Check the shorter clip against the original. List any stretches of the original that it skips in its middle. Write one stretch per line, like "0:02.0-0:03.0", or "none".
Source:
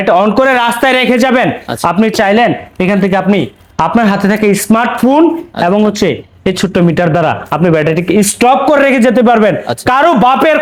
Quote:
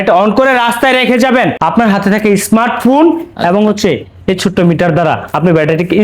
0:01.6-0:03.7